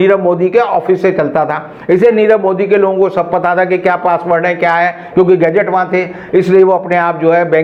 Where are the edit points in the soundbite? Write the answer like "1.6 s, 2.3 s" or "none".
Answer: none